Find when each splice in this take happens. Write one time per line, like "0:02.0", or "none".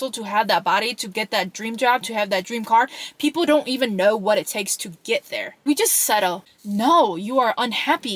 0:05.5
0:06.4